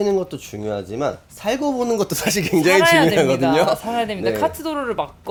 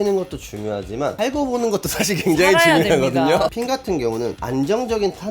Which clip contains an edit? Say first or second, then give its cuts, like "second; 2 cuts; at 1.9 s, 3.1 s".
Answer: second; 2 cuts; at 1.1 s, 3.5 s